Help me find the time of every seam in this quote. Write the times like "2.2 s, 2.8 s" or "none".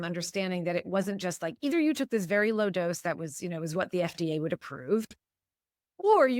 5.4 s